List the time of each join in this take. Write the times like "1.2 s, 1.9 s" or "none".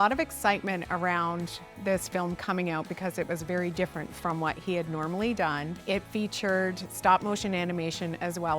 5.7 s